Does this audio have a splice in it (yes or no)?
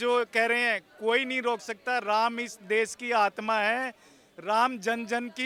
no